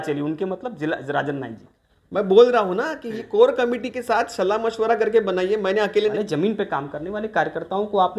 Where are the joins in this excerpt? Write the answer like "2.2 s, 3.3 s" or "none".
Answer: 6.1 s